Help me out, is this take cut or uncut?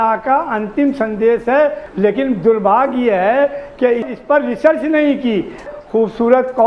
cut